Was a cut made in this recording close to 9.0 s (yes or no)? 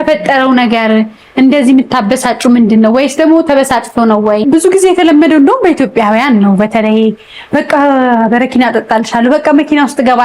no